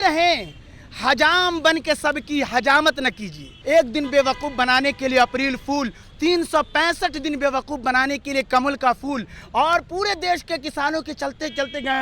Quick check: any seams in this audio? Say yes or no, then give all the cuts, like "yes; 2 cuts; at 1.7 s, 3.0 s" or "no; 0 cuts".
yes; 1 cut; at 3.5 s